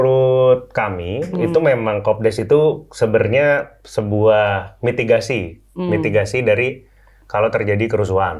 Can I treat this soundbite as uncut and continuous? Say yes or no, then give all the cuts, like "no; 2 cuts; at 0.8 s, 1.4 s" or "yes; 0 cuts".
yes; 0 cuts